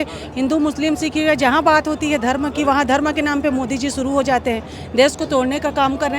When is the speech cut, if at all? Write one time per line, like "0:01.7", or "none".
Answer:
none

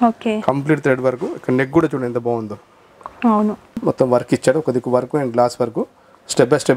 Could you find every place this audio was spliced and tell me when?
0:03.8

